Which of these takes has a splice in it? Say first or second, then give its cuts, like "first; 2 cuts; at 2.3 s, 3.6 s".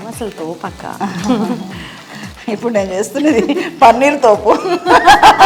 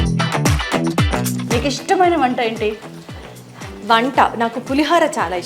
second; 1 cut; at 1.5 s